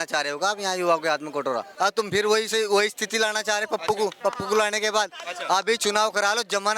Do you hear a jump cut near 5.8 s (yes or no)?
no